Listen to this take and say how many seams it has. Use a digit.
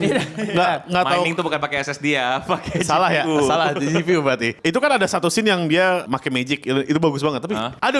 2